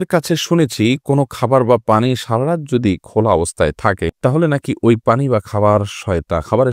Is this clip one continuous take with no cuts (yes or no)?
yes